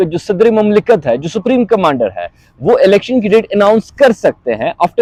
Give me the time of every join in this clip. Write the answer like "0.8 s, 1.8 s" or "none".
none